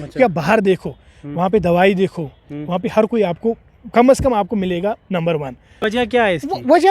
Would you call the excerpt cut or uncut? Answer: cut